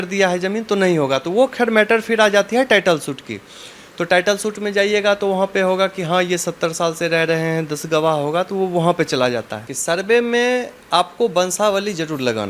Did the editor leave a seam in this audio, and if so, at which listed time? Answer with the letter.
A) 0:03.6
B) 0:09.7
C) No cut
B